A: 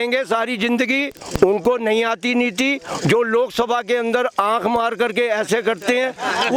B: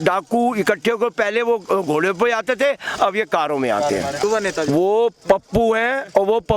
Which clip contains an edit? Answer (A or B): B